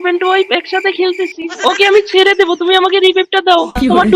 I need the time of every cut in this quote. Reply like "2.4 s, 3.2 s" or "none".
none